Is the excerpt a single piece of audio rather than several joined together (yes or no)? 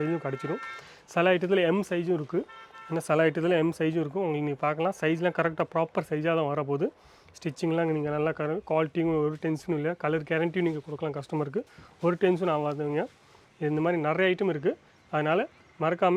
yes